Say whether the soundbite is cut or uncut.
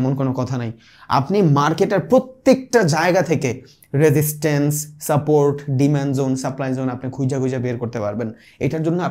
uncut